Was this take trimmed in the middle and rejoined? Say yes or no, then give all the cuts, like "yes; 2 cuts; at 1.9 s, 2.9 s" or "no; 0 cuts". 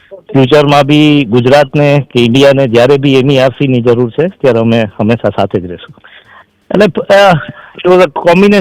yes; 1 cut; at 5.9 s